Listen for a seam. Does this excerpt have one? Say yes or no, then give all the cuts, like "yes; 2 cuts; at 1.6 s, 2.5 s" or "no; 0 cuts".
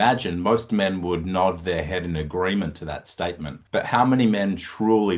yes; 1 cut; at 3.5 s